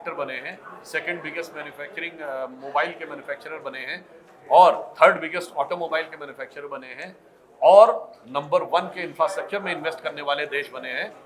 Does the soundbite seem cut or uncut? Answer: uncut